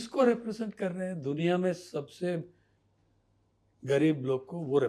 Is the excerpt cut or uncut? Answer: uncut